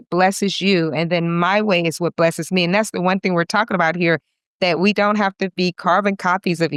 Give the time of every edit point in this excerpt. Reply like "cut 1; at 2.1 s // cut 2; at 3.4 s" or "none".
none